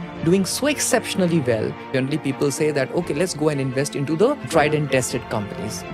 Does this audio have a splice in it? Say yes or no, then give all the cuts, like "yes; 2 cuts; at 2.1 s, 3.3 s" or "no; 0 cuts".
yes; 2 cuts; at 1.8 s, 4.5 s